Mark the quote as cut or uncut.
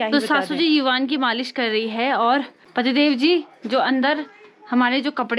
cut